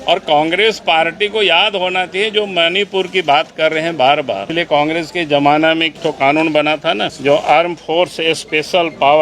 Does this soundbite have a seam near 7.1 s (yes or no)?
yes